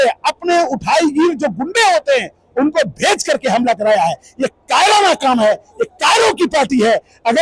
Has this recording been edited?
no; 0 cuts

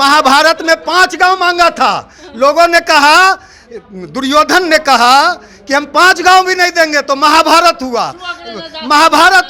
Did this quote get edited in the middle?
no; 0 cuts

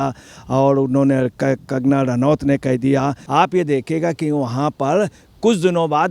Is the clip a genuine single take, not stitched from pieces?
no; 1 cut; at 3.2 s

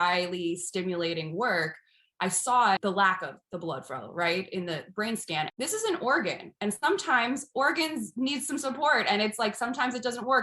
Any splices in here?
yes; 2 cuts; at 2.8 s, 5.5 s

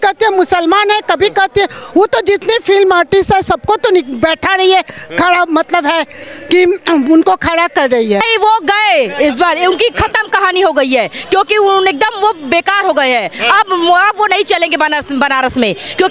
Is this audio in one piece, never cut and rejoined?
no; 1 cut; at 8.2 s

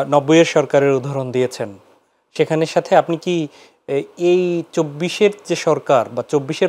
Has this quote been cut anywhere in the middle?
no; 0 cuts

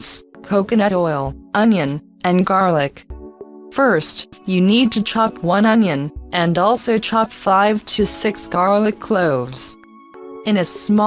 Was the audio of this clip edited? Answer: no; 0 cuts

